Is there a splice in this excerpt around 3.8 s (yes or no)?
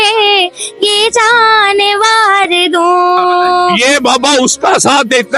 yes